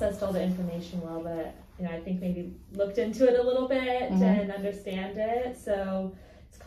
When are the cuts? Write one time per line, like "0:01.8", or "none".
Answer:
none

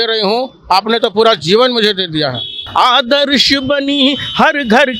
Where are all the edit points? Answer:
0:02.6

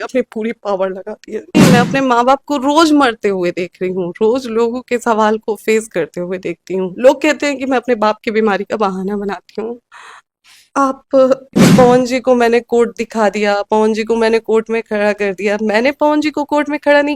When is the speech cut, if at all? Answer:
0:01.5
0:06.9
0:11.6

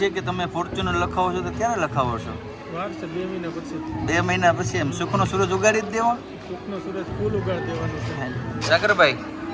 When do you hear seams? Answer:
none

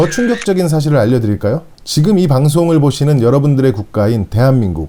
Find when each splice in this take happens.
none

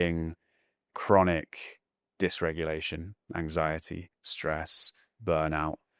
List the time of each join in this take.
none

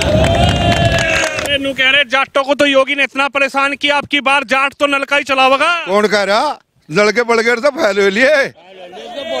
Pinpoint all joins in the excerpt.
0:01.4

